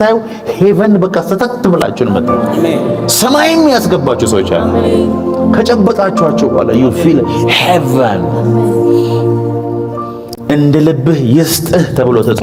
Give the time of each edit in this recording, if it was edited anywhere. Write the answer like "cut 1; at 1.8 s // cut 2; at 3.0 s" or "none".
none